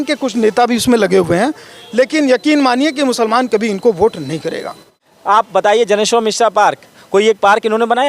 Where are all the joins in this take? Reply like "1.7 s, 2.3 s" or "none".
5.3 s